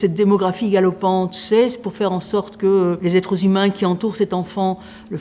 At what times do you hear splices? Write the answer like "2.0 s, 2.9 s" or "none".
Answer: 3.0 s